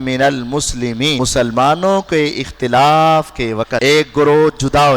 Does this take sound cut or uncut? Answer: cut